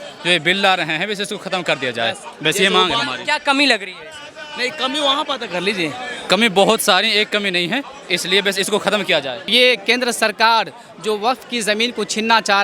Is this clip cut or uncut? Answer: cut